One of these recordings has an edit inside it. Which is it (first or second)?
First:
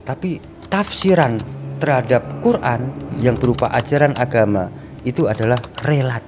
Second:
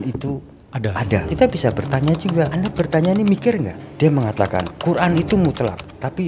second